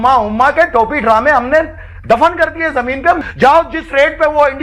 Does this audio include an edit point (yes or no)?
yes